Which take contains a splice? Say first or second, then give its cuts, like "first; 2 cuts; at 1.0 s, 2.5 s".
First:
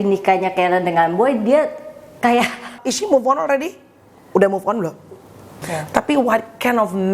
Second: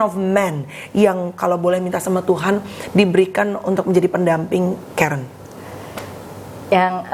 first; 2 cuts; at 2.8 s, 5.6 s